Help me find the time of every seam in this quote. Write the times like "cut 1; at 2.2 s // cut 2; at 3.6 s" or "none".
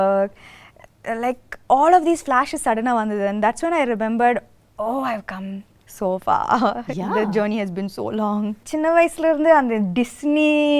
cut 1; at 8.6 s

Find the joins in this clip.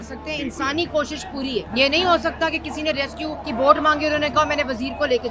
cut 1; at 1.7 s // cut 2; at 3.4 s

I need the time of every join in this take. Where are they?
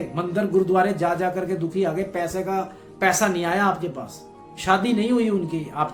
none

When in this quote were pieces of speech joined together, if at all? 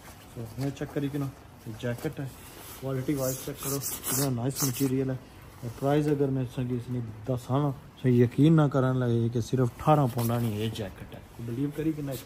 none

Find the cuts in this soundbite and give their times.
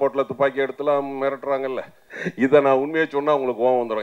cut 1; at 2.2 s

